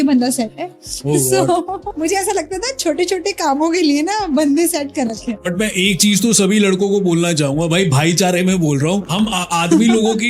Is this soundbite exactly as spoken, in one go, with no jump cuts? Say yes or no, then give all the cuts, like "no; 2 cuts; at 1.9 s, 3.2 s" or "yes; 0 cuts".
no; 3 cuts; at 1.9 s, 5.4 s, 9.1 s